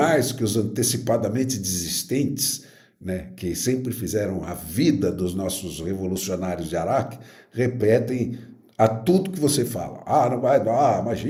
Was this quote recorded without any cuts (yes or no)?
yes